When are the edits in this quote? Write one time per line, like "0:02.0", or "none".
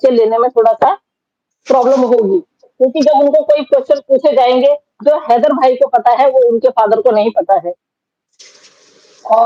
none

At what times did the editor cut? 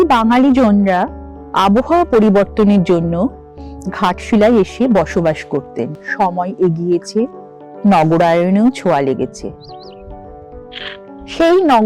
0:06.0

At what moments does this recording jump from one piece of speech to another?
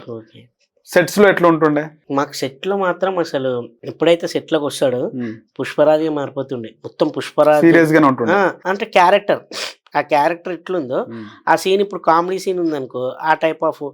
0:03.8
0:08.7

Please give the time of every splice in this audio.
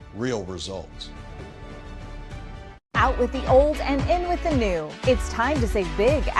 0:02.7

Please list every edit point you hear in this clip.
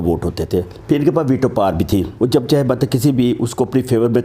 0:02.1

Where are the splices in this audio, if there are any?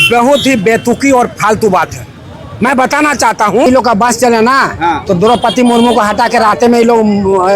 0:03.7

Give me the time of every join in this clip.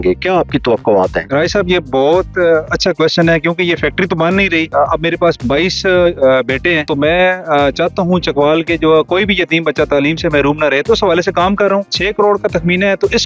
0:01.2
0:04.7
0:06.9
0:12.0

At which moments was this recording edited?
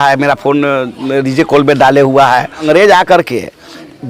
0:02.6

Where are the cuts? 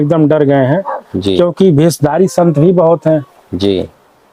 none

